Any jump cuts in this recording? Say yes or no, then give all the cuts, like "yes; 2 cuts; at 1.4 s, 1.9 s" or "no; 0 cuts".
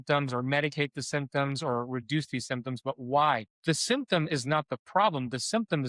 yes; 1 cut; at 3.5 s